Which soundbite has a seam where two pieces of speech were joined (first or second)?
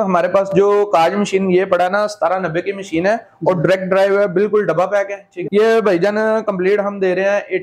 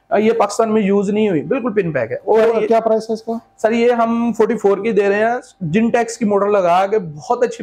first